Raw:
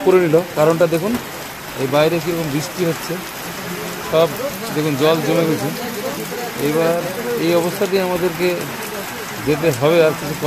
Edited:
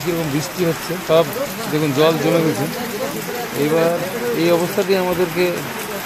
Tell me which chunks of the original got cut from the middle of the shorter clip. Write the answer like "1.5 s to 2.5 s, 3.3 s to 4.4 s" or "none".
3.2 s to 4.0 s